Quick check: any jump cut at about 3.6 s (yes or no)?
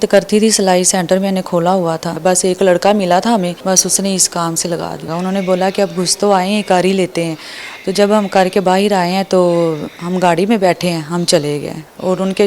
yes